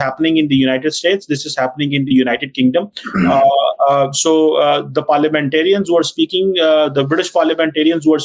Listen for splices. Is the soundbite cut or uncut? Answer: uncut